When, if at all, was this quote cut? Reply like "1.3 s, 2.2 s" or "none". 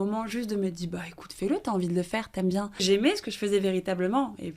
2.8 s